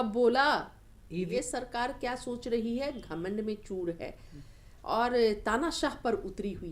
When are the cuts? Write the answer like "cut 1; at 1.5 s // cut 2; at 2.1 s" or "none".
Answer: cut 1; at 1.3 s